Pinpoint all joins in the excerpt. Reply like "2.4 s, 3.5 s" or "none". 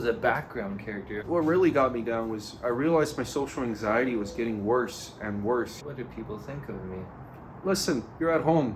1.2 s, 5.8 s, 7.6 s